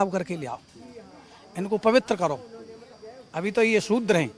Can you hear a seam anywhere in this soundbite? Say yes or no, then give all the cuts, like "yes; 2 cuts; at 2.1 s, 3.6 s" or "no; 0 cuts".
no; 0 cuts